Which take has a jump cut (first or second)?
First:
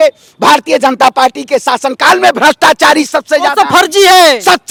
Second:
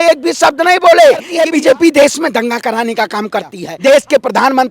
second